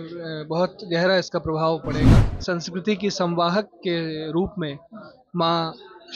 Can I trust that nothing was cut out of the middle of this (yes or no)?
no